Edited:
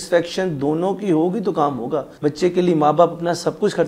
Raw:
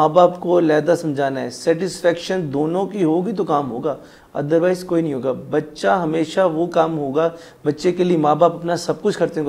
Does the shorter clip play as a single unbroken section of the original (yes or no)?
no